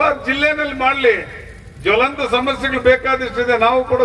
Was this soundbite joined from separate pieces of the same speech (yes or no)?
no